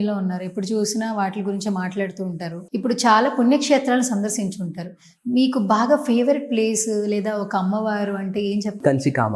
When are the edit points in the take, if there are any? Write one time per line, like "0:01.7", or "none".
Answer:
none